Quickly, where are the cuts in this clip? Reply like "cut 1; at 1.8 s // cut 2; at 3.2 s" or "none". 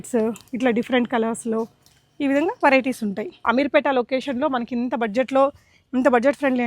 cut 1; at 3.3 s

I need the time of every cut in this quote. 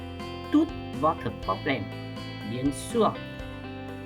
cut 1; at 3.1 s

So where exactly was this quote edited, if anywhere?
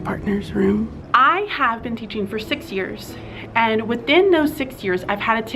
cut 1; at 1.0 s

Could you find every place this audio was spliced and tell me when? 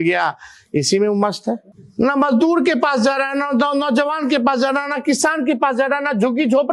cut 1; at 1.8 s

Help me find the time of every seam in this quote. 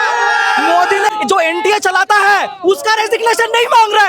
cut 1; at 1.1 s

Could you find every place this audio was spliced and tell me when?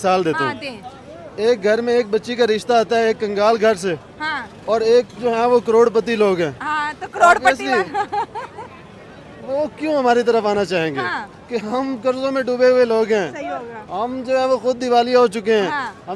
none

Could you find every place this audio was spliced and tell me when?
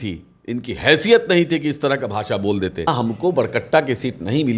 cut 1; at 2.9 s

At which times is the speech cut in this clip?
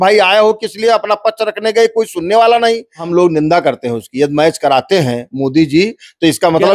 cut 1; at 3.1 s

